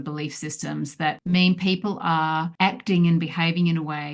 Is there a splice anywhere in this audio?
yes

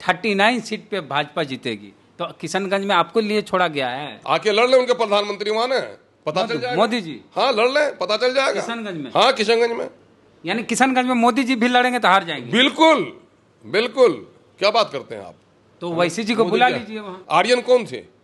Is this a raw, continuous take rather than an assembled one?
no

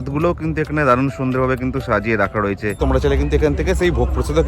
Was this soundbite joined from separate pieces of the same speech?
yes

